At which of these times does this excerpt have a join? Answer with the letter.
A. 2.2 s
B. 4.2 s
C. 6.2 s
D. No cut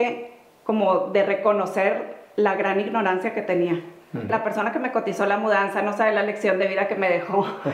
B